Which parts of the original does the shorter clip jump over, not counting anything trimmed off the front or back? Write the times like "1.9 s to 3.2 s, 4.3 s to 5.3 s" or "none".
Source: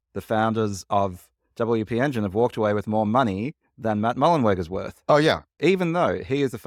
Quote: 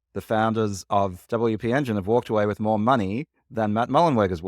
1.2 s to 1.5 s

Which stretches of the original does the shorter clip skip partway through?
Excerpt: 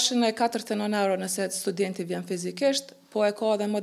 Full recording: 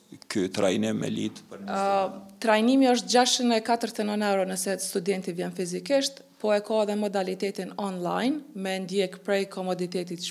none

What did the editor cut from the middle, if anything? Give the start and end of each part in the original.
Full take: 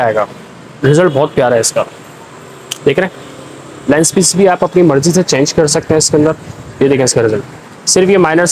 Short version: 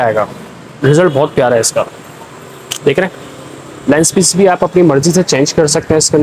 none

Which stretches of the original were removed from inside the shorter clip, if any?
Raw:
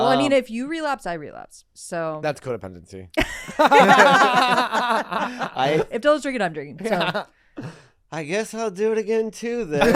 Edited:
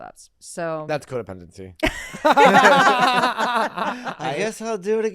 5.5 s to 8.1 s

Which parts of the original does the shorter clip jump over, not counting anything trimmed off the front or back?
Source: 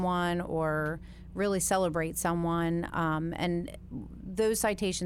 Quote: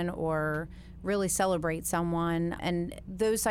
2.9 s to 3.8 s

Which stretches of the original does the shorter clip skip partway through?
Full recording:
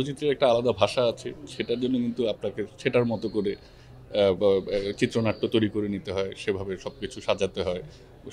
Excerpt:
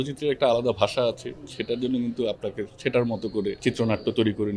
3.6 s to 5.0 s

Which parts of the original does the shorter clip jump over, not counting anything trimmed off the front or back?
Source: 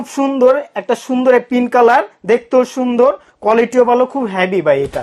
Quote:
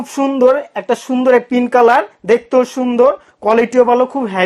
none

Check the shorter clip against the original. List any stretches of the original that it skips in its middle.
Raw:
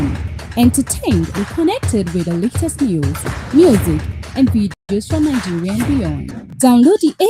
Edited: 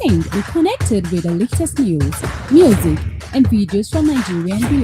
4.7 s to 4.9 s

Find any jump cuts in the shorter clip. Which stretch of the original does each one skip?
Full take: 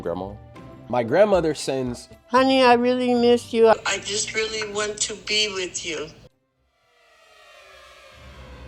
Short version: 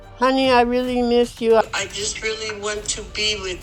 none

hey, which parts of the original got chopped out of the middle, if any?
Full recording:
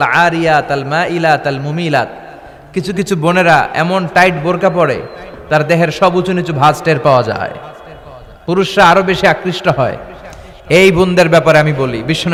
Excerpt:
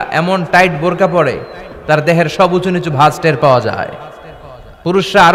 none

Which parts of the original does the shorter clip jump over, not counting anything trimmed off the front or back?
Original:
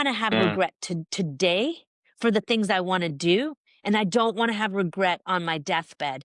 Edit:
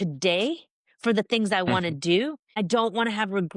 3.8 s to 4.0 s

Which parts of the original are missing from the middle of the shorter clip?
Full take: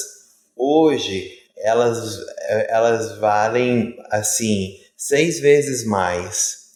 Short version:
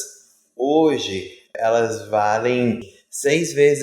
1.6 s to 2.7 s, 4.0 s to 4.7 s

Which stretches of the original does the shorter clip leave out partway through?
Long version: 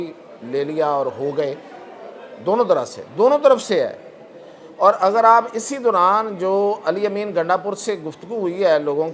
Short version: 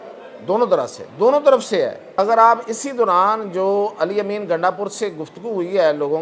4.1 s to 5.0 s

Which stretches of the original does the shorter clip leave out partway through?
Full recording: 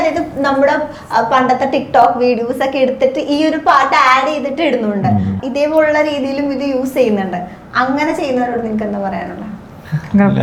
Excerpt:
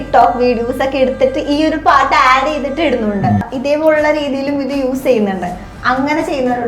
5.3 s to 5.4 s

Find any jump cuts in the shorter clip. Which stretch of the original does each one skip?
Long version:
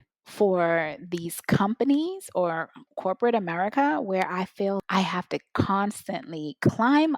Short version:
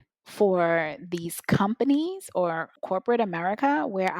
2.7 s to 2.9 s

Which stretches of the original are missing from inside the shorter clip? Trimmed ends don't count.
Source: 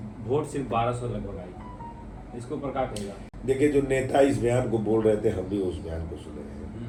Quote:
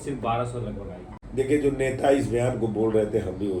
1.6 s to 3.3 s

